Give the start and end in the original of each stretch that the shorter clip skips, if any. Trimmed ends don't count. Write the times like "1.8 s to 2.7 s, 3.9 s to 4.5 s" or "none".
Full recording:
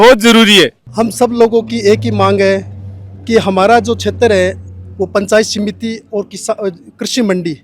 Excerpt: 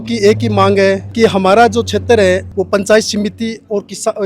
2.7 s to 3.2 s, 4.6 s to 4.9 s

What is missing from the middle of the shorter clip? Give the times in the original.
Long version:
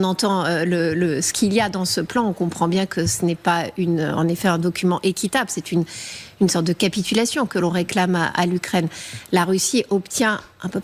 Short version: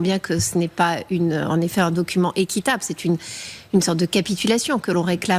none

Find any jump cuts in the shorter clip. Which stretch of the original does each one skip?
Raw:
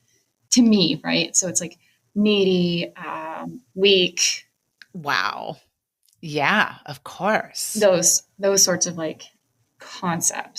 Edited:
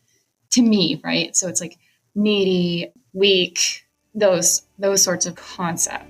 3.0 s to 3.6 s, 4.6 s to 7.6 s, 8.9 s to 9.8 s

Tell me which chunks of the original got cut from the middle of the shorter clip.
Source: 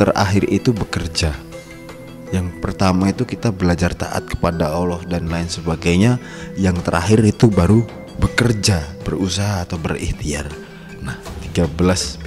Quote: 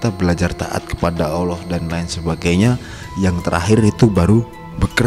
none

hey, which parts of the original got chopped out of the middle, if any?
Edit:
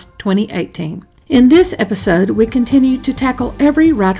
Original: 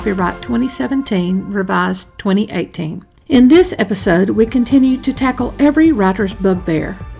none

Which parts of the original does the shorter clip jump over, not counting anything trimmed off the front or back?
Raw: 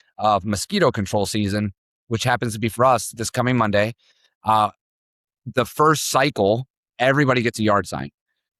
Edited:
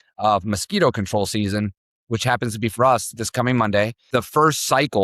4.0 s to 5.4 s

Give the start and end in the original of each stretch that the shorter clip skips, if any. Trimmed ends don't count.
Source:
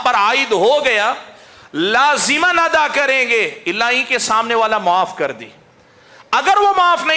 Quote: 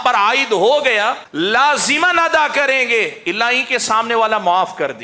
1.2 s to 1.6 s

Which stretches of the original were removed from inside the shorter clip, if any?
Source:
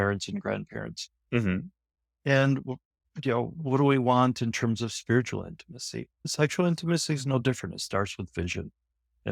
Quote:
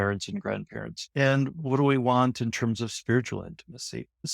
1.4 s to 3.4 s

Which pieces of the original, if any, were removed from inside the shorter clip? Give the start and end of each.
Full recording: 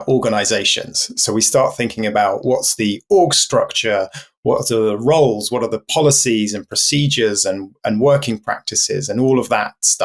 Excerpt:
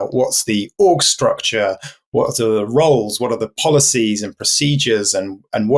none

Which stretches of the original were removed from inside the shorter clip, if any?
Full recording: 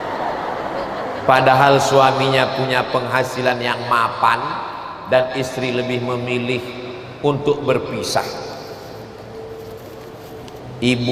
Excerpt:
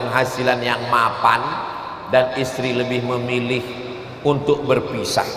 none

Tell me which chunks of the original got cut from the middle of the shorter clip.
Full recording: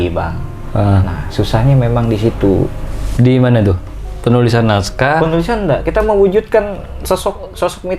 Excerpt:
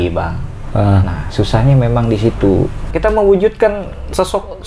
2.9 s to 5.8 s

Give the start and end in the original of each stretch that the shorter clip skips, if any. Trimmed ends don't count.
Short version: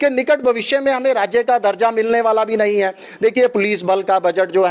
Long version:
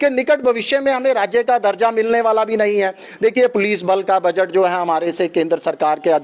none

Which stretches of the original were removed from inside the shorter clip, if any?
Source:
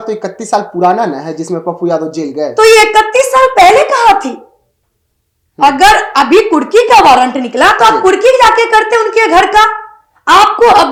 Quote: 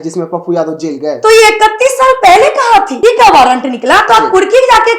4.3 s to 6.7 s

